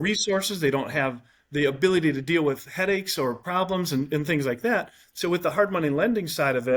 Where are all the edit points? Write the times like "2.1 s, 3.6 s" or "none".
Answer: none